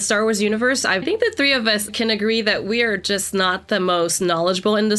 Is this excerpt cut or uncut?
cut